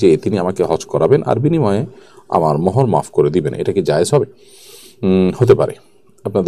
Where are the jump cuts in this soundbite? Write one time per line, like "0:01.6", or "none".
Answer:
none